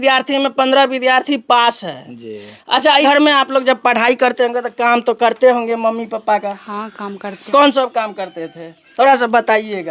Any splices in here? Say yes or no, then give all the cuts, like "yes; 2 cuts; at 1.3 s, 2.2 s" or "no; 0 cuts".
yes; 1 cut; at 3.0 s